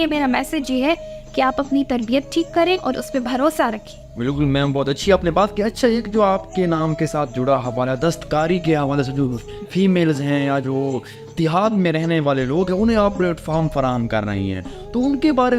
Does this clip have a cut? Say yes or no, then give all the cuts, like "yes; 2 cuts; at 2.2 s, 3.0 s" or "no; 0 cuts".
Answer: no; 0 cuts